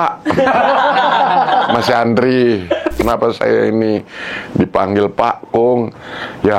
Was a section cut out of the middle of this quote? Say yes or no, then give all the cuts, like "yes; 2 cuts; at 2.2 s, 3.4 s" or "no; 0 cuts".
yes; 1 cut; at 3.0 s